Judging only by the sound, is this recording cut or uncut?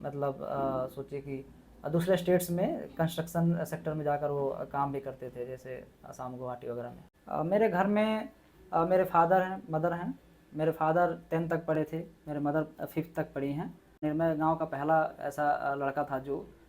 cut